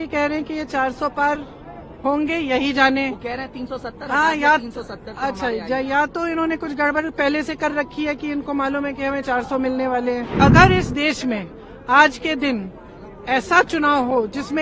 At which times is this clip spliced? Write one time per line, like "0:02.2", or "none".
0:10.3